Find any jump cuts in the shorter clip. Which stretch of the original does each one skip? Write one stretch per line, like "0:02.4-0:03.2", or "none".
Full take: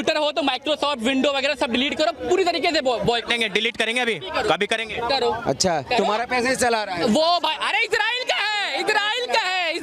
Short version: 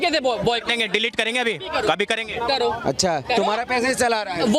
none